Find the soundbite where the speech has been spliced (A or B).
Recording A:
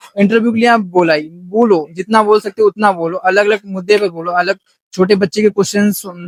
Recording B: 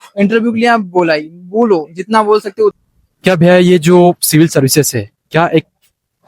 B